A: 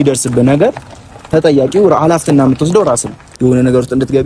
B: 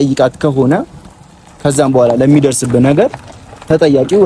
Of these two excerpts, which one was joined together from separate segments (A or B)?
A